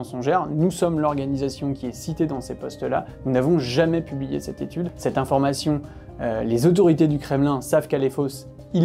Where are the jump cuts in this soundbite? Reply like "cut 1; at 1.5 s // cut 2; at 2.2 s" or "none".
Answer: cut 1; at 4.9 s